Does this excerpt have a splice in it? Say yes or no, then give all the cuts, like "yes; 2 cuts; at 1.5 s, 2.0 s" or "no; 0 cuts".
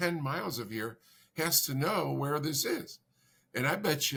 no; 0 cuts